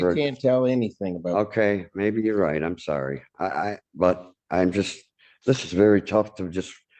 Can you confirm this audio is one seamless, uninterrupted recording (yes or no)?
yes